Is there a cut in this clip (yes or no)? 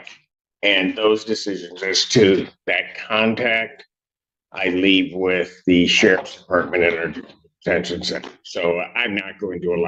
no